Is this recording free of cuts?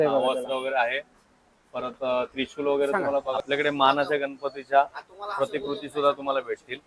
no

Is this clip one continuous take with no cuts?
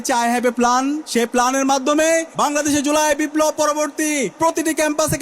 no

